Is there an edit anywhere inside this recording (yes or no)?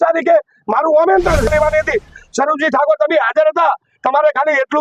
yes